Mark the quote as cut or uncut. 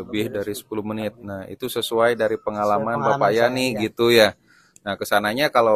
uncut